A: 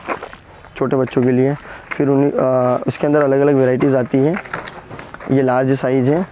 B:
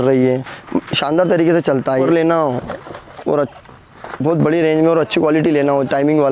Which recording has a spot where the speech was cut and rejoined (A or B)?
B